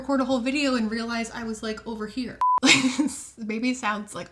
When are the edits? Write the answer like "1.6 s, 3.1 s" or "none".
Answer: 2.4 s